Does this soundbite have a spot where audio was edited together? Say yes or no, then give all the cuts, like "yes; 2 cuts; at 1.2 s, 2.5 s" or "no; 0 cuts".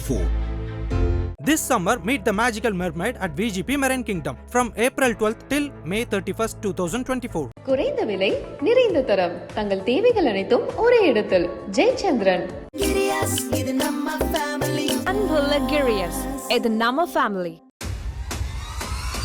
no; 0 cuts